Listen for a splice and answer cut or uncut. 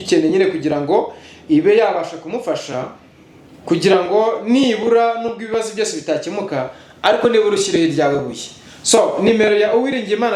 uncut